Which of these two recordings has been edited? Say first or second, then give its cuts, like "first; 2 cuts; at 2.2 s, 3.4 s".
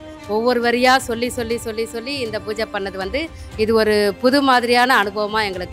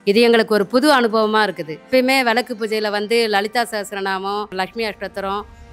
second; 2 cuts; at 1.9 s, 4.5 s